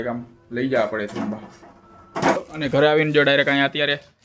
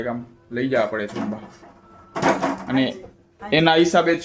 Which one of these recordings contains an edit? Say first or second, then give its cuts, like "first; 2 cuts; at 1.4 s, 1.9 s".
first; 1 cut; at 2.4 s